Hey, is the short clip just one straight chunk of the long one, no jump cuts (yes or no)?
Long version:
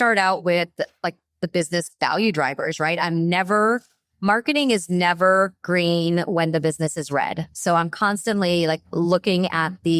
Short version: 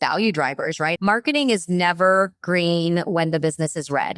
no